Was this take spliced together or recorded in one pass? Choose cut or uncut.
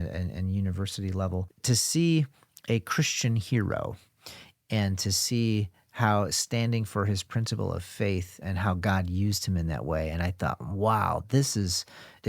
cut